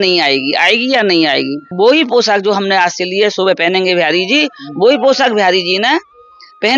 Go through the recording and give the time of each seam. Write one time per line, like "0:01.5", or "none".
0:01.7